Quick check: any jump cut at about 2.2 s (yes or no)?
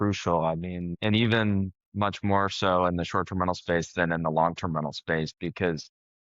no